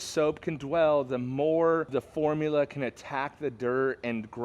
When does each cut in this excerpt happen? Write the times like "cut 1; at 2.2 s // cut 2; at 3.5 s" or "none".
cut 1; at 1.9 s